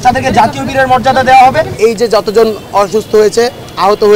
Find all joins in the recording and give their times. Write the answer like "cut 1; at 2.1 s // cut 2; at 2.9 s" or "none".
cut 1; at 1.7 s